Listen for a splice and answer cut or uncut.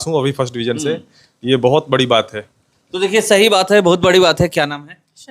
uncut